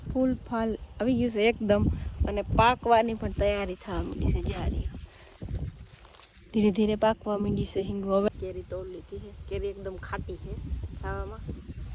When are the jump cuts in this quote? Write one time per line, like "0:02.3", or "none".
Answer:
0:08.3